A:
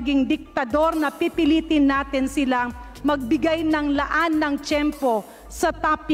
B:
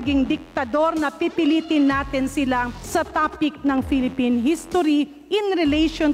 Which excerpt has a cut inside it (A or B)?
B